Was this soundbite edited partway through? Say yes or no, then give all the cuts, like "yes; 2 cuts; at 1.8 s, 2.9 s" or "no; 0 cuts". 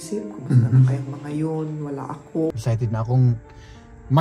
yes; 1 cut; at 2.5 s